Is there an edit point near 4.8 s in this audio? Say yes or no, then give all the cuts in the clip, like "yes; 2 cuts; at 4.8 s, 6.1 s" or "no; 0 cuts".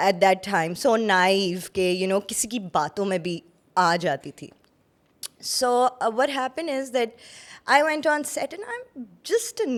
no; 0 cuts